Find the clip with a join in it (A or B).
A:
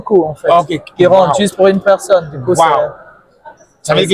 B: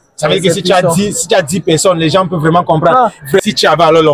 B